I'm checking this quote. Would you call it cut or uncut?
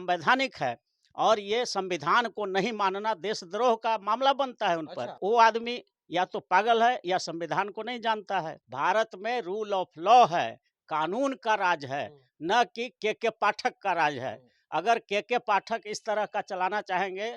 cut